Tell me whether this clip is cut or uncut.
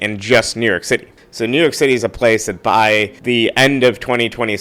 cut